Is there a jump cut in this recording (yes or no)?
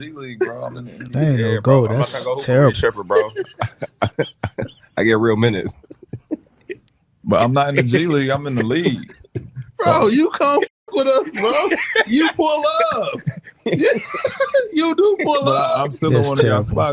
no